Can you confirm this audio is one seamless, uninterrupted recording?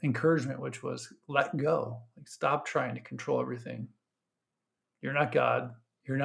yes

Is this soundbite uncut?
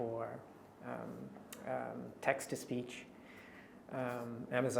yes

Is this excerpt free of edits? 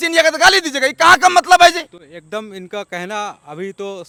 yes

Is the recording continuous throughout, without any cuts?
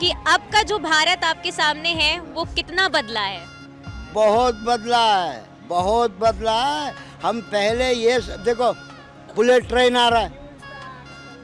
yes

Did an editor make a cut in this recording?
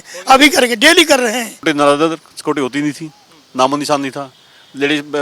yes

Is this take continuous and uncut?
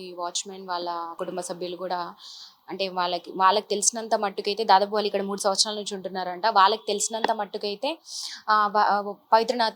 no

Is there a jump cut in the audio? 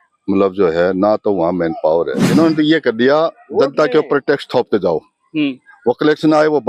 yes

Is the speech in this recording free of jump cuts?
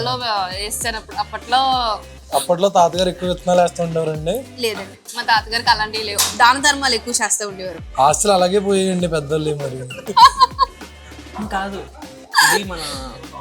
no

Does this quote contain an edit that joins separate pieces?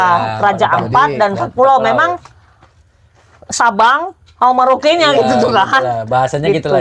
no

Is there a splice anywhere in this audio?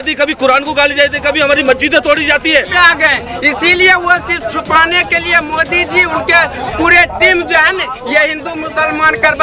yes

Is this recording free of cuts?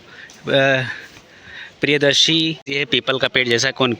no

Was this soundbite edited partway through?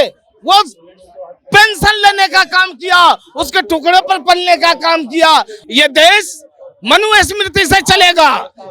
yes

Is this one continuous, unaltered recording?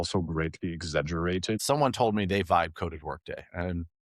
no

